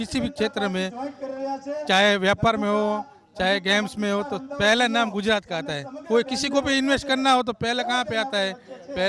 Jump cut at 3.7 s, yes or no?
no